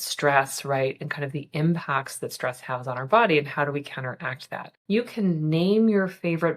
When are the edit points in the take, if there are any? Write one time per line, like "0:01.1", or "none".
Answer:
0:04.7